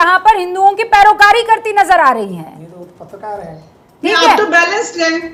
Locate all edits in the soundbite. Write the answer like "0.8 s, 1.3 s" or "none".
none